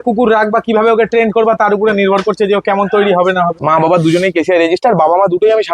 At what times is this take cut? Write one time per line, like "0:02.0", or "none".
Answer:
0:03.6